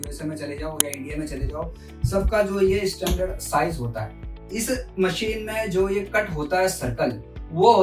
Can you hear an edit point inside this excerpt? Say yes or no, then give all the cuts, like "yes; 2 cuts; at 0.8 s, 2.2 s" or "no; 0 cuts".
no; 0 cuts